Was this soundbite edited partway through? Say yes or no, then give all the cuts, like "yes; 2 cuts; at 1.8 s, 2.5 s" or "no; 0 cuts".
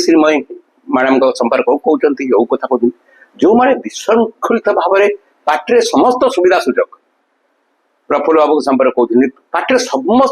no; 0 cuts